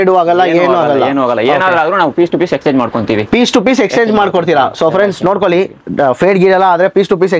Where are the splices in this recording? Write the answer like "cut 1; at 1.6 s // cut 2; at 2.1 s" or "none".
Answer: none